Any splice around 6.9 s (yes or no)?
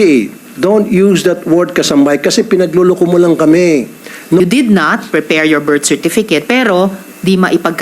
no